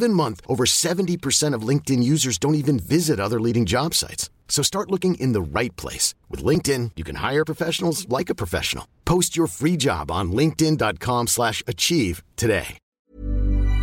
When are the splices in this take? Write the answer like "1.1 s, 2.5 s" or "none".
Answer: 12.8 s